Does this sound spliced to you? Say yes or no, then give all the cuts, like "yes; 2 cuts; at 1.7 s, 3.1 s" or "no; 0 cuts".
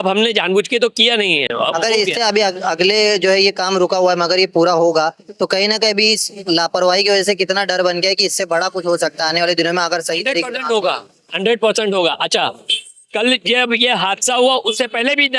no; 0 cuts